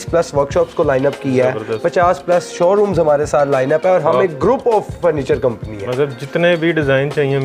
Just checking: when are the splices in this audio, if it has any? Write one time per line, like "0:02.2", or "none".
none

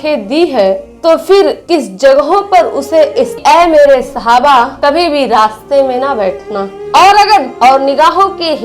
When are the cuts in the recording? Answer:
0:01.6
0:03.4
0:07.5

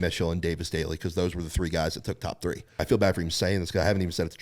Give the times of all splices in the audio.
0:02.8

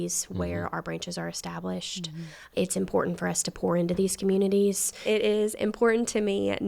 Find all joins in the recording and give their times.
0:04.9

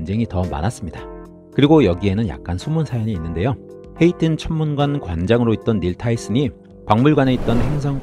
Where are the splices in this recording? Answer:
none

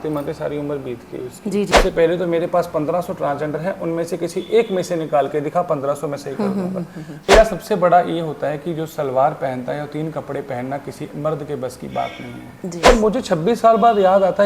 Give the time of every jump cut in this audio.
0:01.7
0:07.3
0:12.9

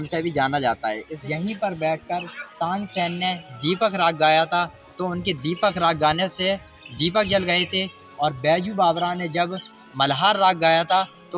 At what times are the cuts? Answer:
0:01.1

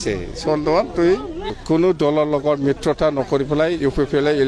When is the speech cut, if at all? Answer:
0:01.5

